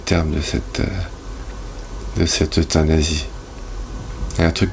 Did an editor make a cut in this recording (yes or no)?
no